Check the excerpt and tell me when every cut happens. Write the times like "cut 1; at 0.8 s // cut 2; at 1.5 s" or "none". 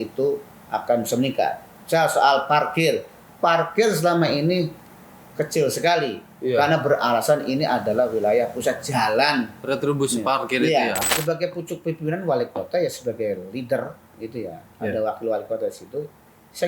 cut 1; at 11.2 s